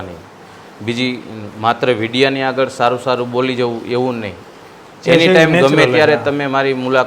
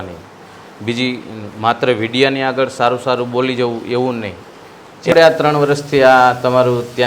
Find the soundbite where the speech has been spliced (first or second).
second